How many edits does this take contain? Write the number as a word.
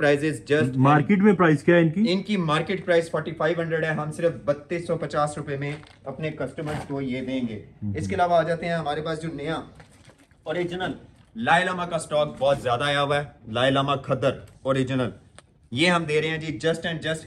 zero